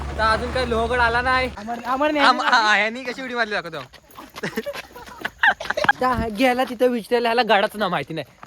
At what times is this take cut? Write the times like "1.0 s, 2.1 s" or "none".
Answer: 1.6 s, 5.9 s